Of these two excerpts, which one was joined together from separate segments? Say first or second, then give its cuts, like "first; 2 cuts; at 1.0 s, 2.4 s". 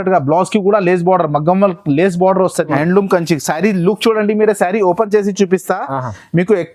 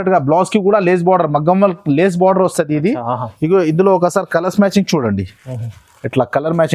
first; 1 cut; at 2.7 s